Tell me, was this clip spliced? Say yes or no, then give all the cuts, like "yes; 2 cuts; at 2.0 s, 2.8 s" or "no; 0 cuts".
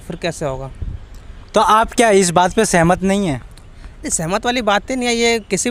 no; 0 cuts